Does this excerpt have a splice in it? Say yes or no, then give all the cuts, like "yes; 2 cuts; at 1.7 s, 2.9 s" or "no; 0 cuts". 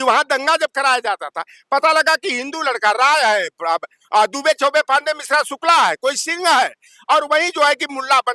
no; 0 cuts